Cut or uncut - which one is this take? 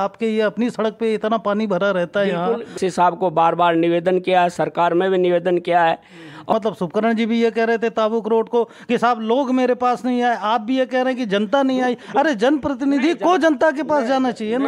cut